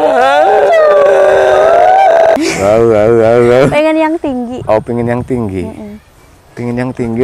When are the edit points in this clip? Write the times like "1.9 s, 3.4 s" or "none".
2.4 s